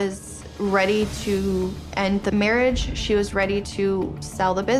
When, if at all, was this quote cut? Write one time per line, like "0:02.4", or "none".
none